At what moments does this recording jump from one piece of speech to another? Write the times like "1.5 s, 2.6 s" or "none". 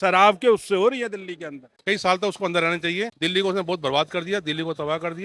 1.8 s, 3.1 s